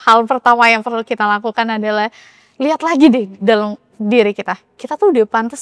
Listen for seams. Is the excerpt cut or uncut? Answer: uncut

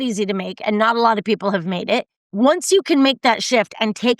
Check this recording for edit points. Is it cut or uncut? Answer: cut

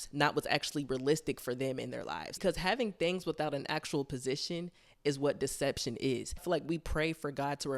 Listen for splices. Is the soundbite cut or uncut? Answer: cut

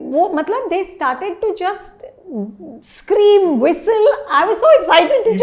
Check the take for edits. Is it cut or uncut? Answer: uncut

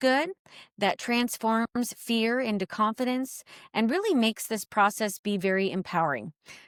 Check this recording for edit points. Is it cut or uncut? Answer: uncut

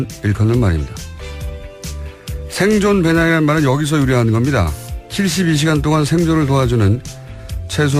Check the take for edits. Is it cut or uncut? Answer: uncut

